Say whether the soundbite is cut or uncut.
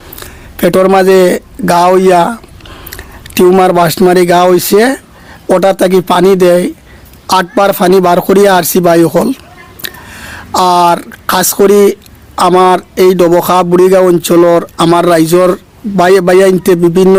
uncut